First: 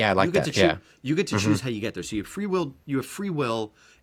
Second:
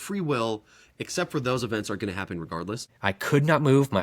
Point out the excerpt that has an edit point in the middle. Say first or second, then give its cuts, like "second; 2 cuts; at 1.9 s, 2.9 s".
second; 1 cut; at 2.8 s